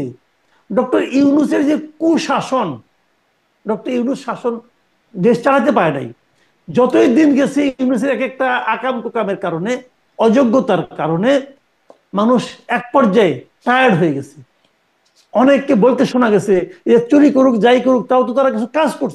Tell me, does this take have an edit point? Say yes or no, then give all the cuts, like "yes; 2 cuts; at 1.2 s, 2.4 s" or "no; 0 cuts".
no; 0 cuts